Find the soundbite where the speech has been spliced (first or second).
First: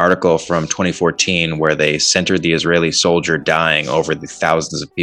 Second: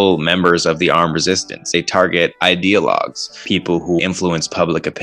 second